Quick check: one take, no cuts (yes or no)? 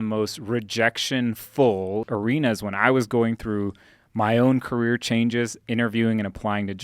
no